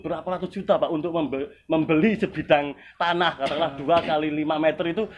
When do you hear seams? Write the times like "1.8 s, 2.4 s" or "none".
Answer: none